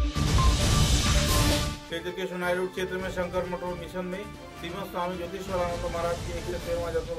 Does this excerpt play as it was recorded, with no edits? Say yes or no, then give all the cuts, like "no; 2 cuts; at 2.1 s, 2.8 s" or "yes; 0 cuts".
yes; 0 cuts